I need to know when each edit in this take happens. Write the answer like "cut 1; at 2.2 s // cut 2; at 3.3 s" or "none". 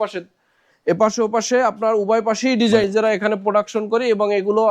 cut 1; at 2.9 s

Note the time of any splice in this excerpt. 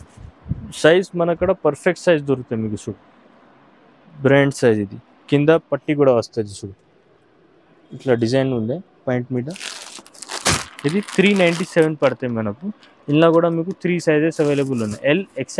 none

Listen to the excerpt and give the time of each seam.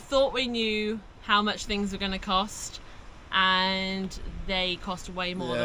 none

